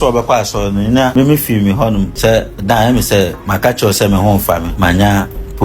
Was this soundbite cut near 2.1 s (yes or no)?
yes